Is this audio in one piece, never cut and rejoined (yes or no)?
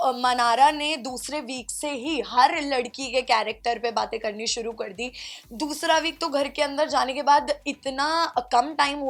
yes